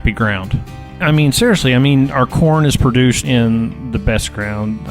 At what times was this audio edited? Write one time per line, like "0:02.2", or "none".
0:00.9
0:03.2